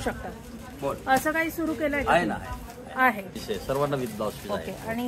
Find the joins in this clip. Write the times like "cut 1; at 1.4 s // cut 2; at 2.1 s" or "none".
cut 1; at 3.3 s